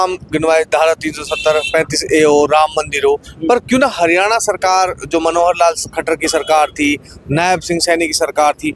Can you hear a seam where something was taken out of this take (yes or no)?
no